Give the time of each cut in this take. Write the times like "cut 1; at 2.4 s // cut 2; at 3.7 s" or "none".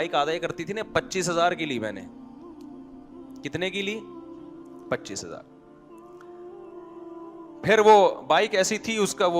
cut 1; at 5.5 s // cut 2; at 7.5 s